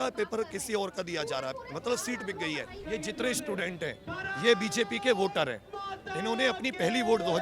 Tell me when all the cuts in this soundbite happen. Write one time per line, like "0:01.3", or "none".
0:02.8